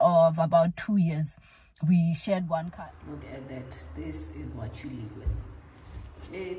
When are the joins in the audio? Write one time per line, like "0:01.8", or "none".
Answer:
0:02.7

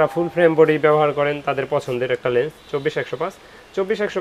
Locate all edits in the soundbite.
none

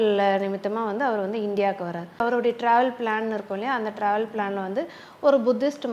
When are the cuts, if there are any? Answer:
0:02.2

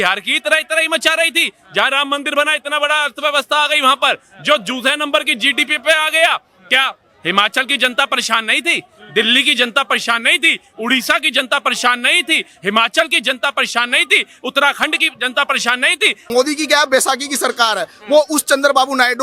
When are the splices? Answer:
0:16.2

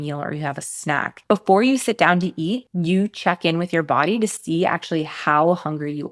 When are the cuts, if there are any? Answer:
0:01.1

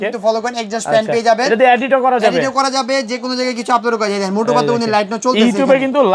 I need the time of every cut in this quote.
none

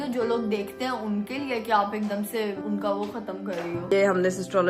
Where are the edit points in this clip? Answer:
0:02.6
0:03.9

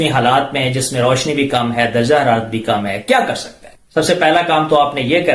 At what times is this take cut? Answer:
none

